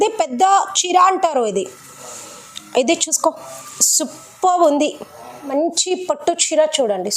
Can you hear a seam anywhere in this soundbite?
yes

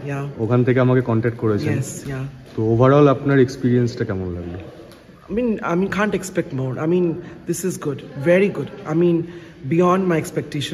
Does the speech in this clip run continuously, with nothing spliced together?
yes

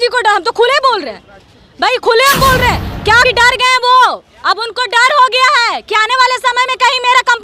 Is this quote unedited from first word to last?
no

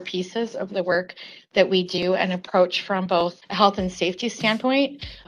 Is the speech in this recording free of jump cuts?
yes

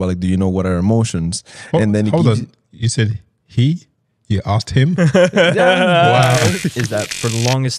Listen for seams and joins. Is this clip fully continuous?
no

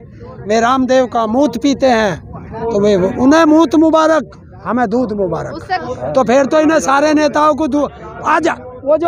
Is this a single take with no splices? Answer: no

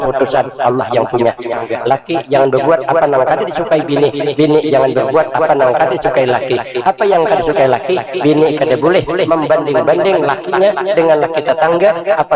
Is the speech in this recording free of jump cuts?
no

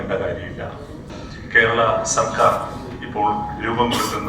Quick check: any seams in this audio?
yes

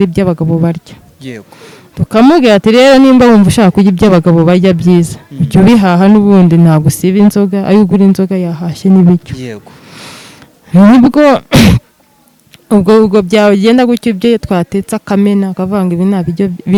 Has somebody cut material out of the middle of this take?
no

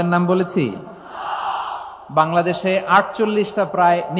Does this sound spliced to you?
no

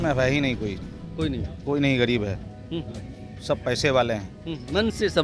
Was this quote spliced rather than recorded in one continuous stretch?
no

